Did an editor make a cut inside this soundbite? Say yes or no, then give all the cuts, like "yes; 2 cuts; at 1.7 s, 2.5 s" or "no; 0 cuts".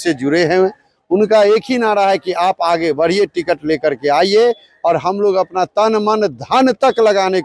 no; 0 cuts